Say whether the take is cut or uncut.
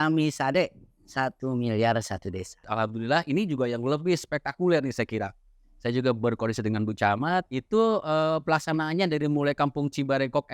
cut